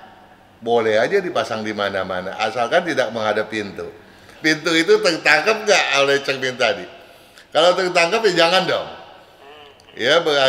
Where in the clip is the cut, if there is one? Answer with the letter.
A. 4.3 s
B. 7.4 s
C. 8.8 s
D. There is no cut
A